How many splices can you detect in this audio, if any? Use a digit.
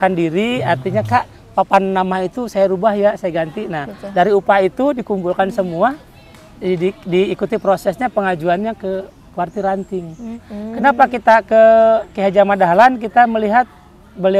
1